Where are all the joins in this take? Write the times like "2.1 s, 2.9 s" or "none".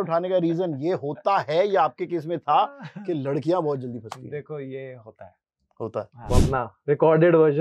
6.2 s